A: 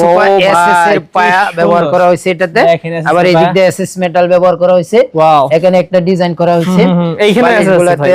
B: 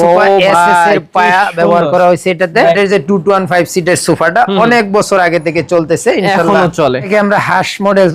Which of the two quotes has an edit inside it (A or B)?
B